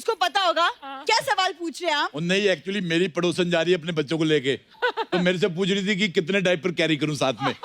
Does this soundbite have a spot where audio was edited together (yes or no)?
no